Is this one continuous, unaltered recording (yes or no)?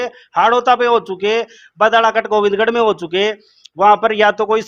yes